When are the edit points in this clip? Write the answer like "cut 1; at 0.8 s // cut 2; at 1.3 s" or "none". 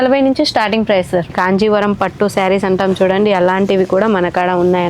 cut 1; at 1.3 s